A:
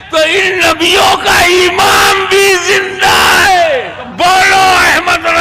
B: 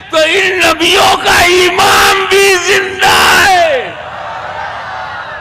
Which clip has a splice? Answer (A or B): A